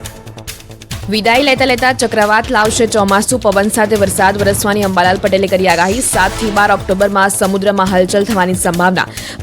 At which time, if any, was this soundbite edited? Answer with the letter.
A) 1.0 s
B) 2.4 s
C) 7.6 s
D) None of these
A